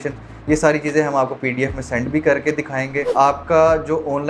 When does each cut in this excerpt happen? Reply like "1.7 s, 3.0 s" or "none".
3.1 s